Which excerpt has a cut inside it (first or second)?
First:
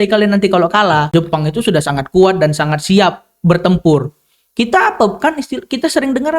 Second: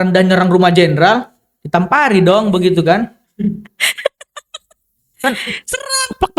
first